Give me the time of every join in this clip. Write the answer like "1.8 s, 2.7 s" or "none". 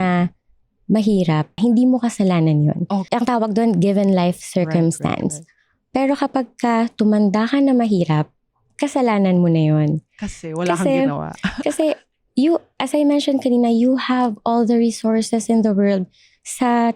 1.5 s, 3.0 s